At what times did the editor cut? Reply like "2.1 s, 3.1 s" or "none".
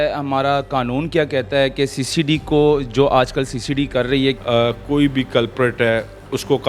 4.4 s